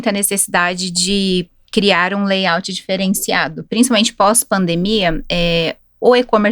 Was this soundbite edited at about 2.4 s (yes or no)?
no